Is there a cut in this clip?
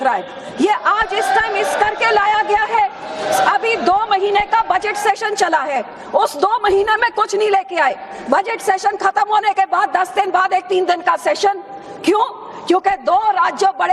yes; 1 cut; at 8.5 s

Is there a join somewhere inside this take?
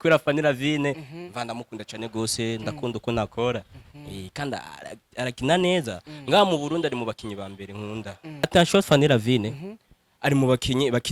yes; 1 cut; at 8.5 s

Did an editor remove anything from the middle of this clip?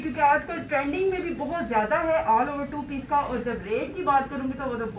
no; 0 cuts

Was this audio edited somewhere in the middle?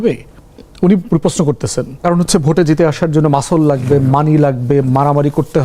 yes; 1 cut; at 1.9 s

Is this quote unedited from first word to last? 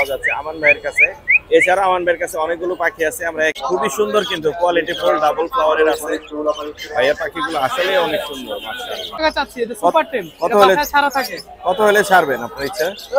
no; 2 cuts; at 3.6 s, 9.2 s

